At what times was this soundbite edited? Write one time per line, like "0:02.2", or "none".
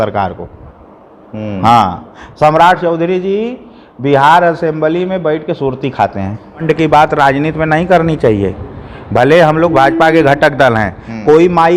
0:06.6